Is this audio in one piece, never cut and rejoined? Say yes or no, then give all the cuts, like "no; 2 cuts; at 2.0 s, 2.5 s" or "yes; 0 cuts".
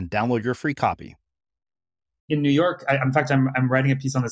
no; 1 cut; at 2.3 s